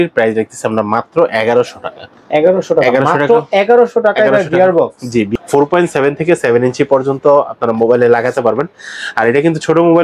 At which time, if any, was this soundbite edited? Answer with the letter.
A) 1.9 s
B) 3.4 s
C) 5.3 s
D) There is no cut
C